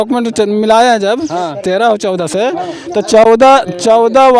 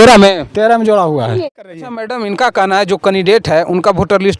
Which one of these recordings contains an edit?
second; 1 cut; at 1.9 s

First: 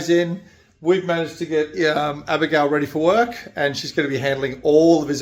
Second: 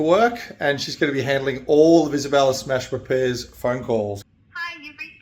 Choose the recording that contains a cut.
second; 1 cut; at 4.2 s

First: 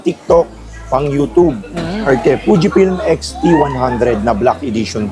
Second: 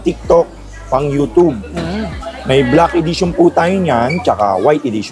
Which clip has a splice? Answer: first; 1 cut; at 2.1 s

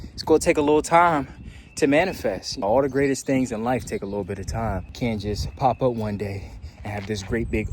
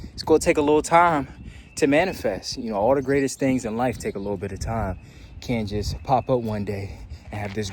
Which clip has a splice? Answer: first; 2 cuts; at 2.5 s, 4.9 s

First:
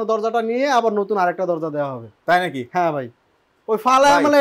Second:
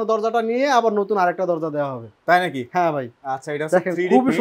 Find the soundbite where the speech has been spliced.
second; 1 cut; at 3.1 s

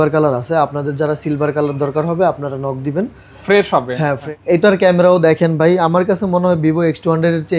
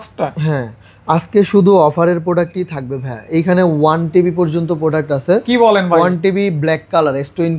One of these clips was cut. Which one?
first; 1 cut; at 4.2 s

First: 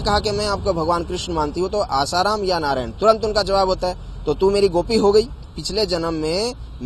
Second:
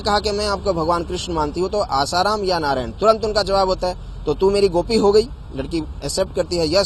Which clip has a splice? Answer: first; 1 cut; at 5.5 s

